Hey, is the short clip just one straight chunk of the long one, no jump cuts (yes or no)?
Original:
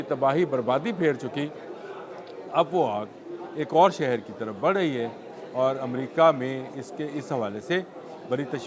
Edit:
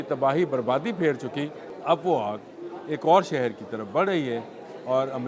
no